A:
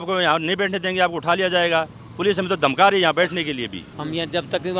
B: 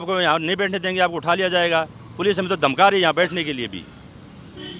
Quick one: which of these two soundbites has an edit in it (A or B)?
A